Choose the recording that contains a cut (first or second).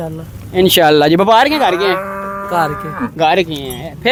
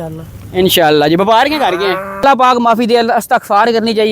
second